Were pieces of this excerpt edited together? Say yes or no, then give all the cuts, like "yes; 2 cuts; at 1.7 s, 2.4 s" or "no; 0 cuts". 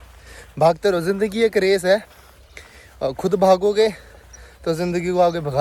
no; 0 cuts